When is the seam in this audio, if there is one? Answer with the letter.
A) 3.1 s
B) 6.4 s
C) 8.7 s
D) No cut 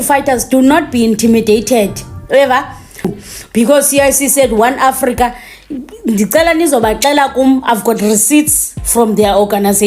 A